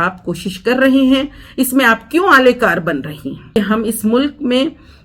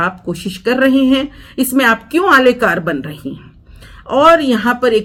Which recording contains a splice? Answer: first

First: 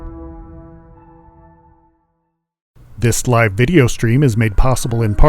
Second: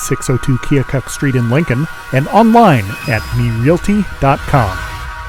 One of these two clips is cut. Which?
first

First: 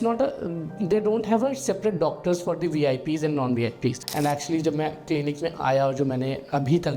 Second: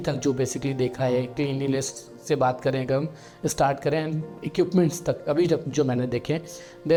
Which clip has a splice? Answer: first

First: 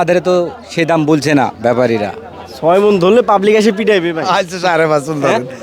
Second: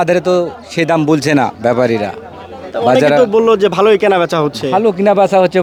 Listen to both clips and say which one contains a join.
first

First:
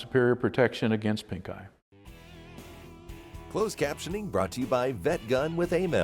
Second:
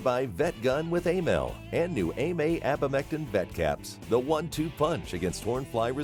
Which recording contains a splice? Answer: first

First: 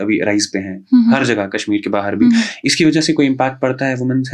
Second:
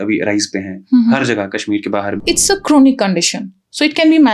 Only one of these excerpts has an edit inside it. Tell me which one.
second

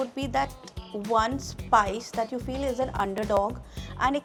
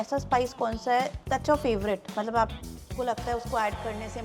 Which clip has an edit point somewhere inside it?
second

